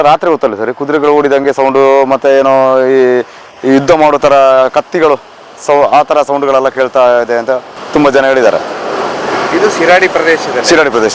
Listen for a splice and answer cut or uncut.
uncut